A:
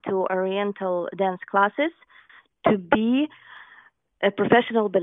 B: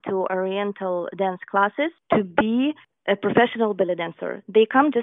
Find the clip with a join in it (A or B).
B